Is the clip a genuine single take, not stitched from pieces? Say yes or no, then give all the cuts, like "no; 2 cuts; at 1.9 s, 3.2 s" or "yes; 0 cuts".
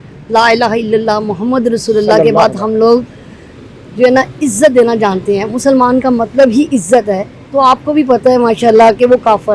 yes; 0 cuts